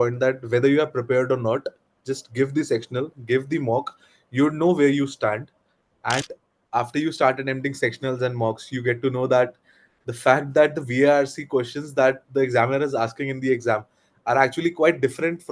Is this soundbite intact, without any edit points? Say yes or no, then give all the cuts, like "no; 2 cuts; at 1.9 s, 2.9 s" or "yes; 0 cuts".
no; 1 cut; at 6.3 s